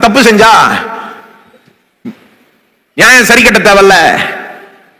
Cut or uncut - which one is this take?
uncut